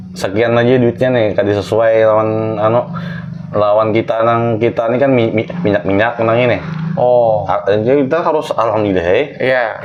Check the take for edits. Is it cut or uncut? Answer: uncut